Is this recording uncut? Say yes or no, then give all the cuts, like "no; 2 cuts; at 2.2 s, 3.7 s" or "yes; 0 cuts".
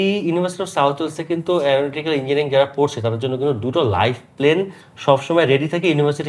yes; 0 cuts